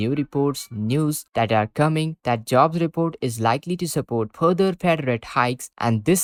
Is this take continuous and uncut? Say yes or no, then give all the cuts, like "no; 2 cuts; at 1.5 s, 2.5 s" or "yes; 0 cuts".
yes; 0 cuts